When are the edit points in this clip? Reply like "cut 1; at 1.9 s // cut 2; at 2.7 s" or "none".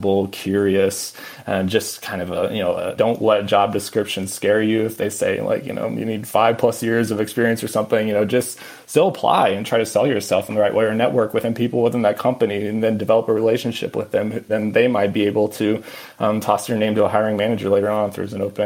cut 1; at 2.9 s